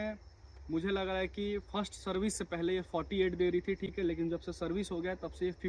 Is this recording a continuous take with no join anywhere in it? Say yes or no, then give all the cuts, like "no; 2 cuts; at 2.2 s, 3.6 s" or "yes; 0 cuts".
yes; 0 cuts